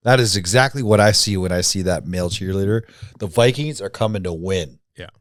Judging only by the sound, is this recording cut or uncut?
uncut